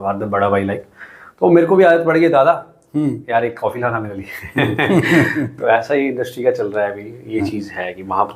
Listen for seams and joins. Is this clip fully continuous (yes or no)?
yes